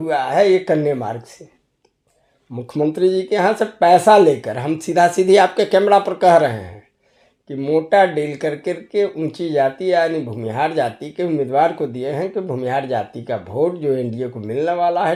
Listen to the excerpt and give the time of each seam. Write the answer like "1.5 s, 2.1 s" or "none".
none